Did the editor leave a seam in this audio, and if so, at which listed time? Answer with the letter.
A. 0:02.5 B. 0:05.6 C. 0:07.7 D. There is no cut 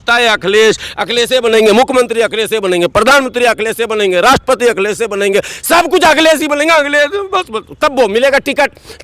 D